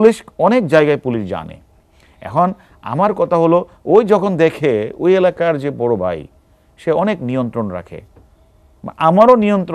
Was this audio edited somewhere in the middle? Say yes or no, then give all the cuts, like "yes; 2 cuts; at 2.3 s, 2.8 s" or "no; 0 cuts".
no; 0 cuts